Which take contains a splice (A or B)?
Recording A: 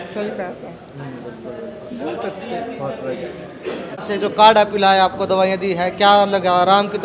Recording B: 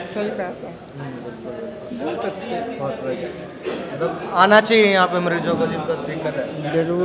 A